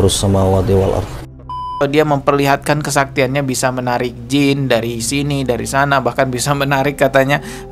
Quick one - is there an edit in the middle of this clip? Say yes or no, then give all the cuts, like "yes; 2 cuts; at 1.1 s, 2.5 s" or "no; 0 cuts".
yes; 1 cut; at 1.7 s